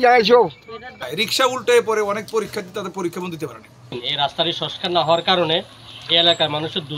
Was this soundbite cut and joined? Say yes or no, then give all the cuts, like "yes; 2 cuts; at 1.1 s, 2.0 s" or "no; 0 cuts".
yes; 2 cuts; at 1.1 s, 4.0 s